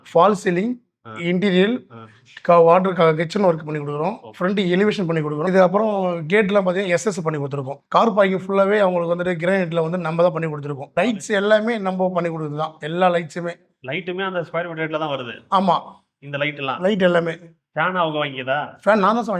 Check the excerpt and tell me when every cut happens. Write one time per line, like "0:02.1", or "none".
0:05.4
0:10.9